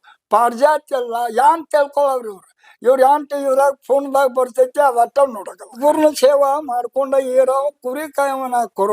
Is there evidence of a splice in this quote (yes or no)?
yes